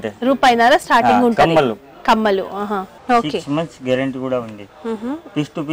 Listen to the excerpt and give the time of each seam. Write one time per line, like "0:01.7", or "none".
0:02.9